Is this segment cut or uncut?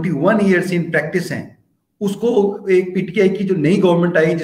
uncut